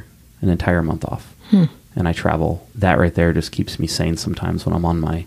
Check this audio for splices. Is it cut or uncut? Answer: cut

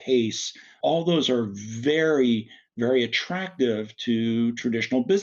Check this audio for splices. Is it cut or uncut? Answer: uncut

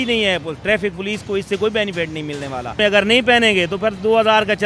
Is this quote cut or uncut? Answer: cut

